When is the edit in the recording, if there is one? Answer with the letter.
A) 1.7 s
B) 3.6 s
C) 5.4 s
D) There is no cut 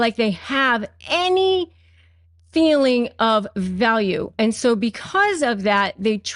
D